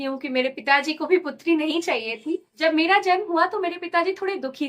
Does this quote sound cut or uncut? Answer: cut